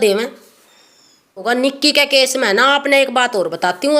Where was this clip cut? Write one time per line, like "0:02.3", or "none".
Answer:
0:01.4